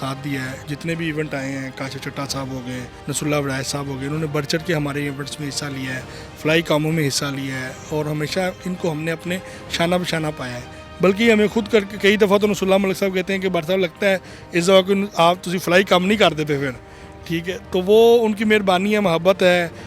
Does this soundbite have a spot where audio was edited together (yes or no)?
no